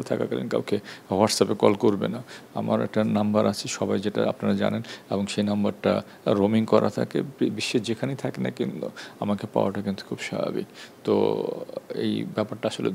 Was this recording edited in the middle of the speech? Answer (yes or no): no